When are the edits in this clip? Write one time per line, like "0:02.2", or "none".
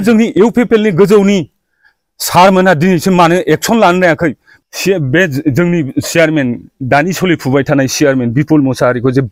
0:04.5